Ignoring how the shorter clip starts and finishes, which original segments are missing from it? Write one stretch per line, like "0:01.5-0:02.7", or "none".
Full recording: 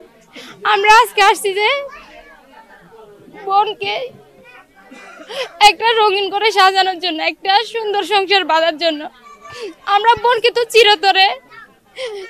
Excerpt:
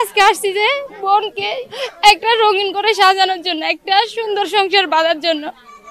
0:01.9-0:03.4
0:04.1-0:05.3